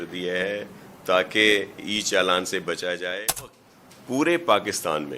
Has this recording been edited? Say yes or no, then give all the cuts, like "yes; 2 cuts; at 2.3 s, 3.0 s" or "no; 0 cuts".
yes; 1 cut; at 3.5 s